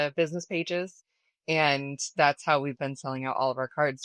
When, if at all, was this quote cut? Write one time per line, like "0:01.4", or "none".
none

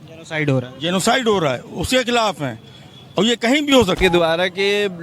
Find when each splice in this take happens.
0:04.0

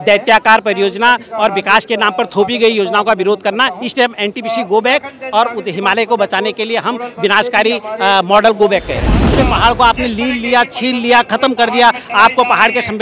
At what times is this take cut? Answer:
0:09.3

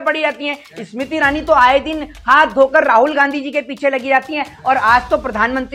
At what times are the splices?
none

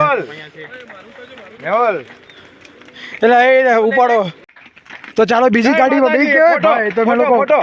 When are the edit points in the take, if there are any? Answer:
0:04.4

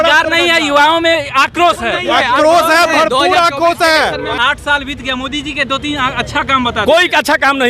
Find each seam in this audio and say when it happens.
0:04.4

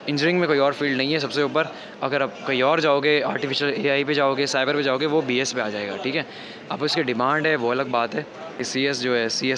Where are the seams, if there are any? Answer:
0:08.6

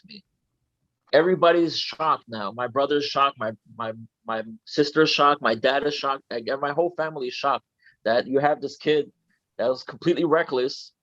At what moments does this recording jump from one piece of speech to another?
0:01.1

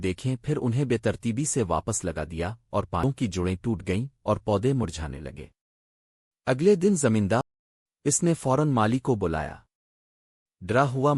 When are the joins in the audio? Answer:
0:03.0
0:07.6

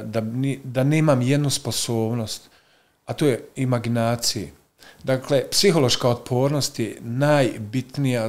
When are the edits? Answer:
none

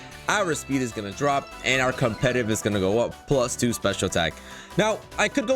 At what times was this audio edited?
none

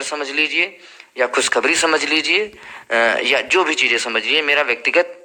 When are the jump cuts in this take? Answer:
none

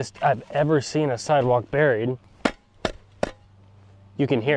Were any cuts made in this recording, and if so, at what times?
0:02.3

